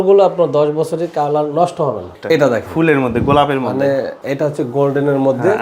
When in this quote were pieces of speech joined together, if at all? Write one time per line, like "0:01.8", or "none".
0:02.1
0:04.2